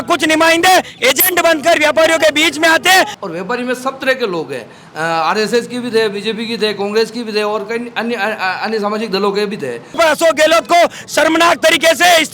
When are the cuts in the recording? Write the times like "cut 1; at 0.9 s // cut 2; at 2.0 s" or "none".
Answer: cut 1; at 3.1 s // cut 2; at 10.0 s